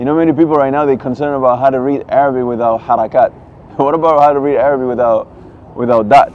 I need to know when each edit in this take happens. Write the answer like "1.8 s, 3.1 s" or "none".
none